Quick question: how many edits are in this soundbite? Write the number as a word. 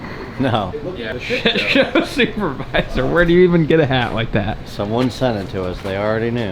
one